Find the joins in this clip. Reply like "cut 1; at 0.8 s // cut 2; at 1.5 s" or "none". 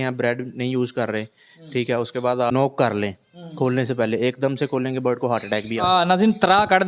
cut 1; at 2.5 s